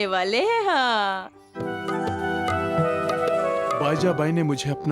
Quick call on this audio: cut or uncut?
cut